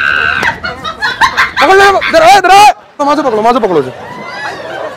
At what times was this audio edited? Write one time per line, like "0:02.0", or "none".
0:01.0
0:03.0